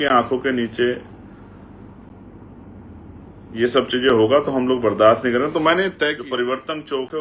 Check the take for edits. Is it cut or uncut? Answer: cut